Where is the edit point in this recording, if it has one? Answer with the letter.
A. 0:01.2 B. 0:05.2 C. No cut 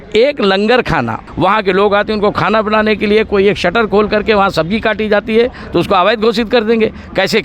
A